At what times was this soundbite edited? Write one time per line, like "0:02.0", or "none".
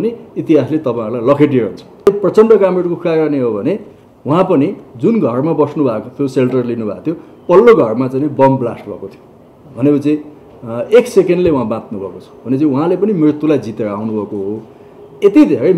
0:02.1